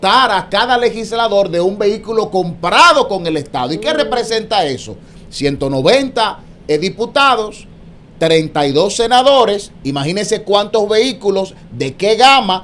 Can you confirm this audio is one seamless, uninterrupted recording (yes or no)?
yes